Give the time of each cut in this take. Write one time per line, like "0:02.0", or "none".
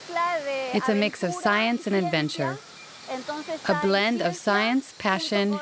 none